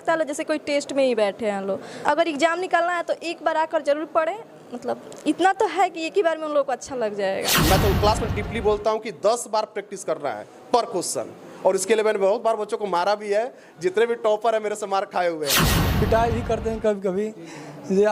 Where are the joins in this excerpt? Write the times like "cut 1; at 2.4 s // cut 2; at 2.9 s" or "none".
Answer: cut 1; at 1.9 s // cut 2; at 7.5 s // cut 3; at 15.6 s

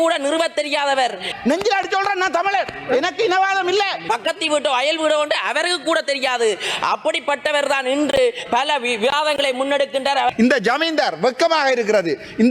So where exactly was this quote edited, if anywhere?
cut 1; at 1.2 s // cut 2; at 4.1 s // cut 3; at 10.3 s

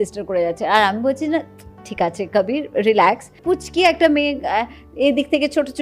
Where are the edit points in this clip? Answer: cut 1; at 3.3 s

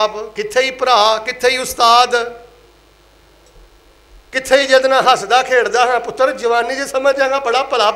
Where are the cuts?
none

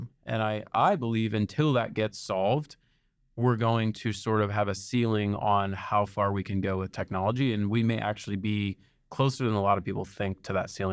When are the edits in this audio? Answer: none

